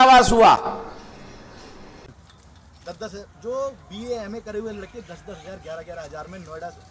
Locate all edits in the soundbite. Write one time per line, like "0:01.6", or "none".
0:02.1

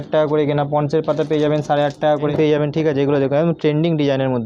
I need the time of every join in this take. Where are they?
0:02.3

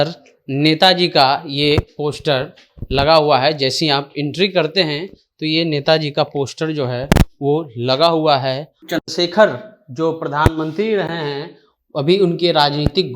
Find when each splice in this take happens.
0:08.8

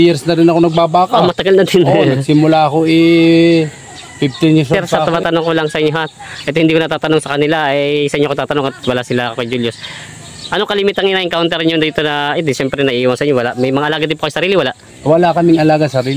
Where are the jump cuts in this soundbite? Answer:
0:04.7

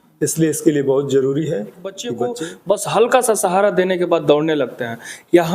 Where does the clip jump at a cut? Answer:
0:02.1

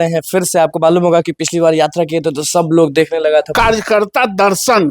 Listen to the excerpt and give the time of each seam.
0:03.5

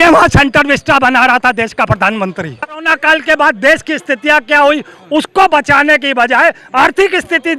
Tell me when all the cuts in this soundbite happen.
0:02.9

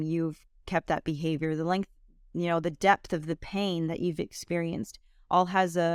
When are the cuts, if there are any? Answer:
none

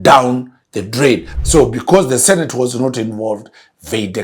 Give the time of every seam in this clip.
0:01.3

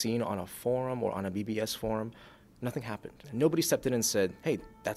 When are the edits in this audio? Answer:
0:03.2

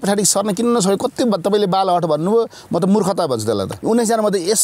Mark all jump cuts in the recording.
0:03.7

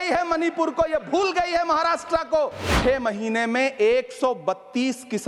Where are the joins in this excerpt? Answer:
0:02.7

